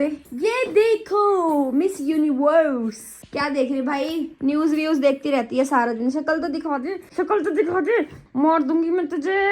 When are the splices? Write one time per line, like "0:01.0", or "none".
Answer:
0:03.2
0:08.2